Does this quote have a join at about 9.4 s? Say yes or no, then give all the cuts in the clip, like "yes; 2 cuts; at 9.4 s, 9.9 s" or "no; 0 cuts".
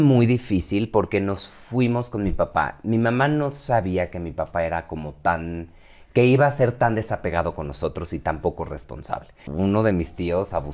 yes; 1 cut; at 9.4 s